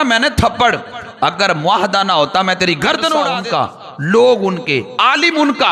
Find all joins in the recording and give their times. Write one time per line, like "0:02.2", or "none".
0:03.3